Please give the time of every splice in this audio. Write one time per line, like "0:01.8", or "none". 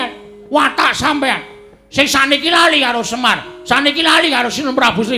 none